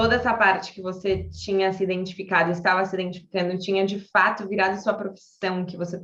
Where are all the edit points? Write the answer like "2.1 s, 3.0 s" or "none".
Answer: none